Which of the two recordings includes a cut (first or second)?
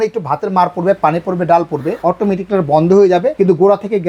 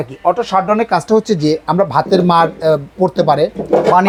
first